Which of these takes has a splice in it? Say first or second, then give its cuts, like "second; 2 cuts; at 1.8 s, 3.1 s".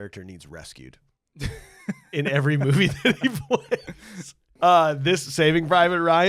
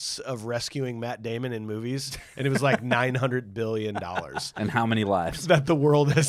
first; 1 cut; at 4.4 s